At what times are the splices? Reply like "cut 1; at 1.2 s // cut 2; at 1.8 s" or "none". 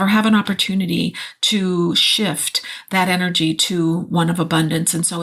none